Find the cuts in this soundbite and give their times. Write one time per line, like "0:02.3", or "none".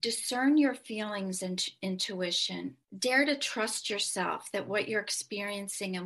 none